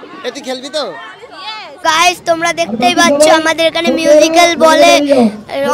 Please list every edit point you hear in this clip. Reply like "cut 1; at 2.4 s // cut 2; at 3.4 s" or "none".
cut 1; at 1.7 s